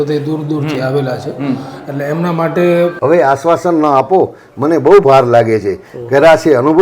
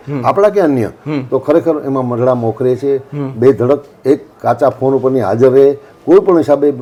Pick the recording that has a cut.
first; 1 cut; at 3.0 s

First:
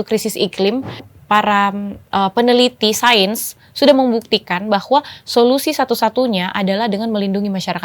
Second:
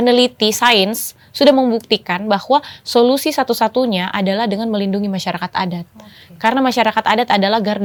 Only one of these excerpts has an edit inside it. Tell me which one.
first; 1 cut; at 1.1 s

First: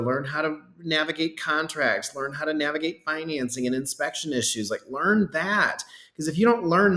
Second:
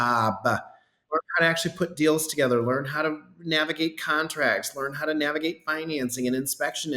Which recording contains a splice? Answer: second; 1 cut; at 1.0 s

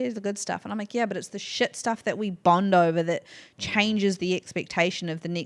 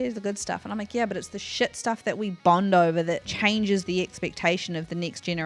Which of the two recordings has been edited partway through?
second; 1 cut; at 3.3 s

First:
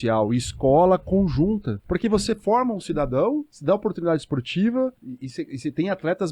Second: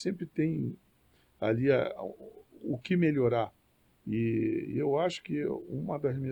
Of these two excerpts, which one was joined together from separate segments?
first; 3 cuts; at 1.7 s, 3.5 s, 5.1 s

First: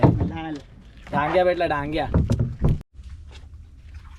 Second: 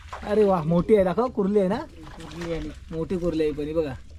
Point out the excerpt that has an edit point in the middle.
first; 1 cut; at 2.8 s

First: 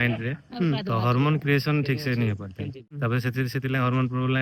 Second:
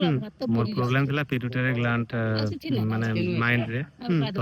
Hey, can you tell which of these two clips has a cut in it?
first; 1 cut; at 2.9 s

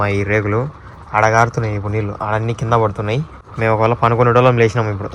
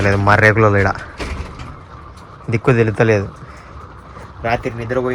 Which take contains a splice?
first; 1 cut; at 3.4 s

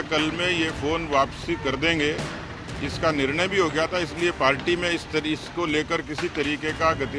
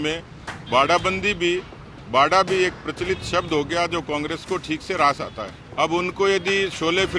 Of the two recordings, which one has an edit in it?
second; 1 cut; at 5.6 s

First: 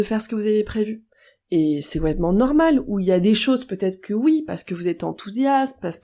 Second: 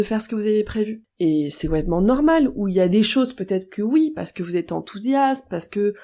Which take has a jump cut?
second; 1 cut; at 1.0 s

